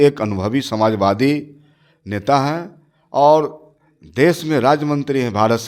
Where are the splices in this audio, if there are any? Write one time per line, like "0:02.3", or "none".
none